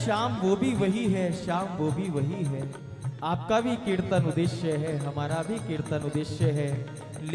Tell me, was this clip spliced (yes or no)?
no